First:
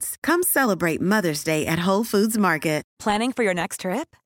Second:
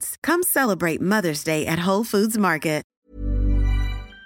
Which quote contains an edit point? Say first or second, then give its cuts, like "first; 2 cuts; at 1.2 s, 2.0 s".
second; 1 cut; at 2.9 s